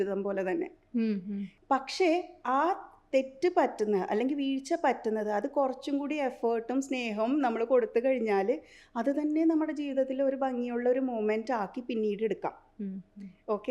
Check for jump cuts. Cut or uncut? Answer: cut